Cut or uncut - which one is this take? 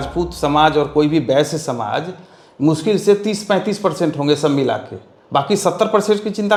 uncut